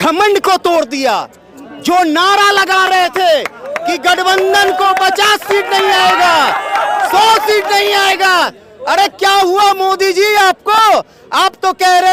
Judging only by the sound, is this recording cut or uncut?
uncut